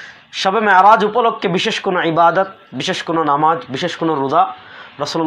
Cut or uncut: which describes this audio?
uncut